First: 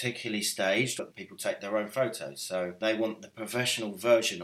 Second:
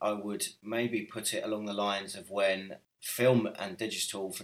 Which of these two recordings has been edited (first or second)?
first